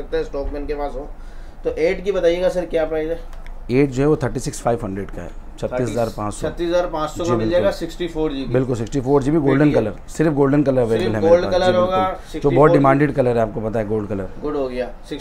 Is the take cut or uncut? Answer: uncut